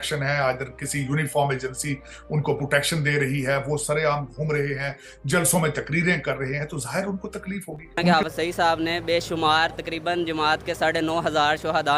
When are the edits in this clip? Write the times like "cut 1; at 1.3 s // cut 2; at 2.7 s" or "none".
cut 1; at 8.1 s